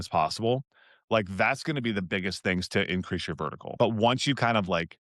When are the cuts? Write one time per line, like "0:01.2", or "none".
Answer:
0:03.6